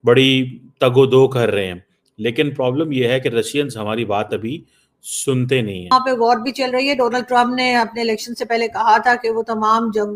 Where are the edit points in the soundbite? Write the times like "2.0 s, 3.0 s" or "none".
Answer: 5.9 s